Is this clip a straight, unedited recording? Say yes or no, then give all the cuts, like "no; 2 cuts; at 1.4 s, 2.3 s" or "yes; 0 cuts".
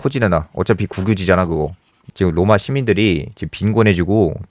no; 1 cut; at 2.0 s